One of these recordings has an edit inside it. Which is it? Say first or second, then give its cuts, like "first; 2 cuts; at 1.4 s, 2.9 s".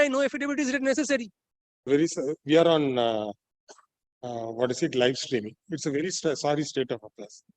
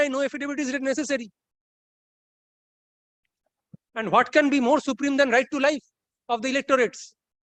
first; 1 cut; at 1.8 s